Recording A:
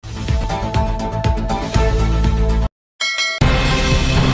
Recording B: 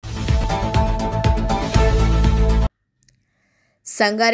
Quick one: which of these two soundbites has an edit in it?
A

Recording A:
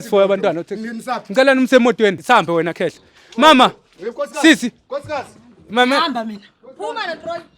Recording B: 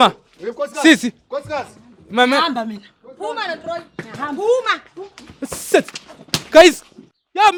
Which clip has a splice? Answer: A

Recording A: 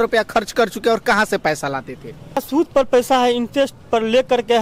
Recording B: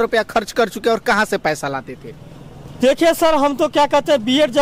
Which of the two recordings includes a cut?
A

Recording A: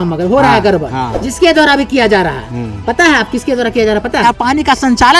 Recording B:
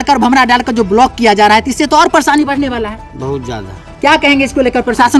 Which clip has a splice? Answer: A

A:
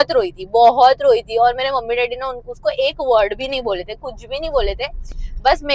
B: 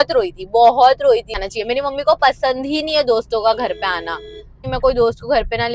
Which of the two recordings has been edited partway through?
B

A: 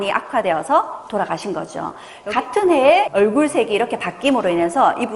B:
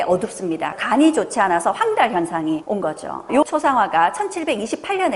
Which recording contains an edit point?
A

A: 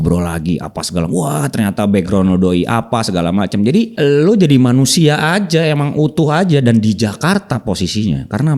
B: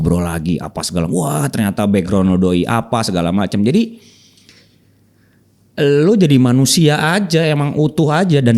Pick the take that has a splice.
A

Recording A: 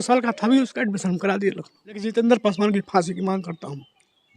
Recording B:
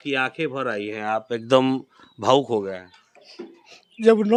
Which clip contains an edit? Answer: A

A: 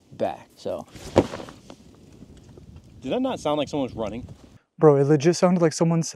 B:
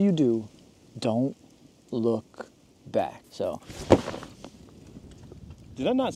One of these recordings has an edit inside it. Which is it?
A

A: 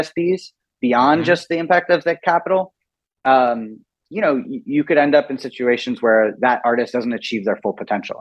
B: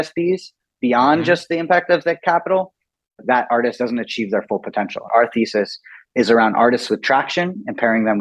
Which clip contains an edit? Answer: B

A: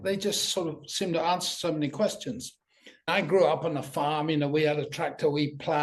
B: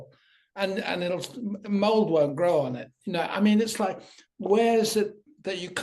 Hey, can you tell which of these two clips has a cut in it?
A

